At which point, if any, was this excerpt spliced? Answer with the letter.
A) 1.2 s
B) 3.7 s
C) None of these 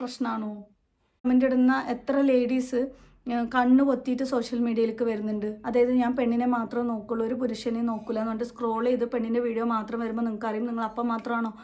A